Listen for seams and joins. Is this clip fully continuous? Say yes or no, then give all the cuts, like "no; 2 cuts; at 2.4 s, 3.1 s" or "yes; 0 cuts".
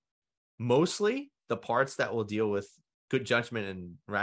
yes; 0 cuts